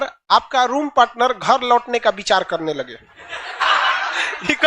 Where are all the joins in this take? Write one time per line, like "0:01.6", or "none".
0:03.6